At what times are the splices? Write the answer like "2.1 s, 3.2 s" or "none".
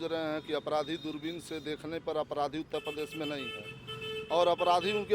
none